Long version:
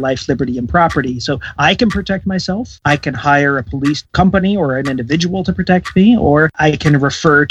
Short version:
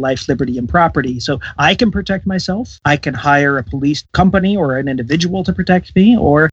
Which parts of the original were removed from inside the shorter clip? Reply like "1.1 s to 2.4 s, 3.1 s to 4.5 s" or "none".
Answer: none